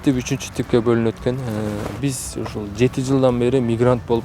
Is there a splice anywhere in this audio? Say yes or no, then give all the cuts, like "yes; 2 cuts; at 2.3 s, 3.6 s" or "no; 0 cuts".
yes; 1 cut; at 1.8 s